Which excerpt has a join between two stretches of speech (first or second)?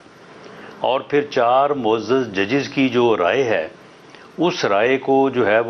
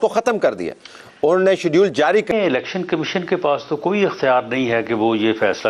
second